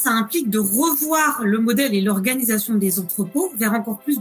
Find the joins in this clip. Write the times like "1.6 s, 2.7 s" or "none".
none